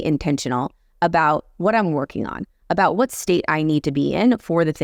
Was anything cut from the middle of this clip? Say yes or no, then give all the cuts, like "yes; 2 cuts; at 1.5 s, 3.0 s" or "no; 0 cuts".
no; 0 cuts